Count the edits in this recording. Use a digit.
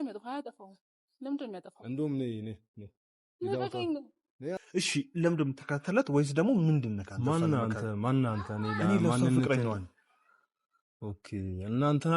1